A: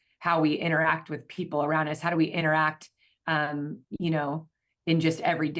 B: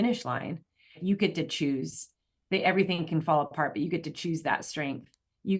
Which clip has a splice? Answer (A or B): B